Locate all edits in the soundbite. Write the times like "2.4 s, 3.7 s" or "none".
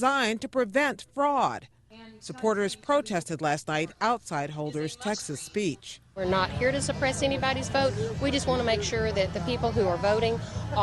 2.5 s

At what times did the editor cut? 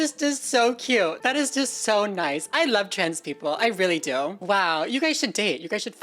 1.2 s, 4.4 s

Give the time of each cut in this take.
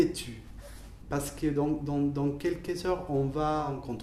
none

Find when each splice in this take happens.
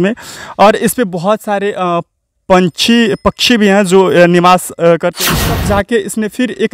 5.6 s

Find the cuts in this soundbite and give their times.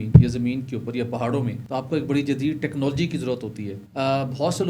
1.6 s, 3.7 s

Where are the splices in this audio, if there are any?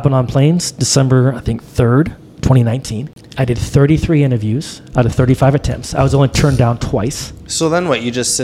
3.2 s

